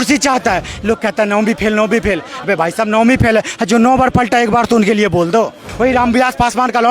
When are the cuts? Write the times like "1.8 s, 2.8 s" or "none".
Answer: 5.6 s